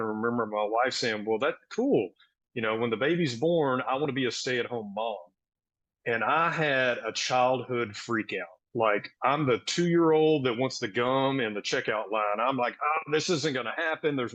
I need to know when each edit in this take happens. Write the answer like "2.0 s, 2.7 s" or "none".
none